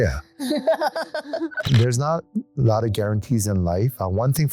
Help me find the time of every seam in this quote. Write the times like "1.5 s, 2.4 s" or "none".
1.6 s